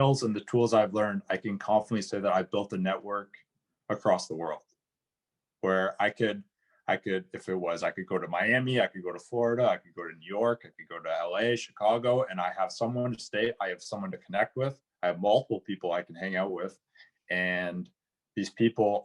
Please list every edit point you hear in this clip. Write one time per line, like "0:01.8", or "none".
none